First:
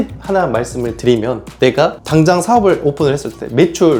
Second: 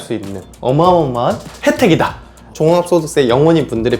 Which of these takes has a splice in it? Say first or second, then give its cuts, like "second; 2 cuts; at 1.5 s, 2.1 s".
second; 1 cut; at 2.5 s